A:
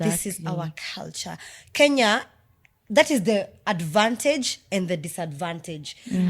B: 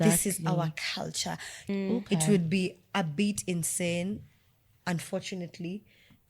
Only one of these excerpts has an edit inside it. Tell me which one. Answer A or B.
B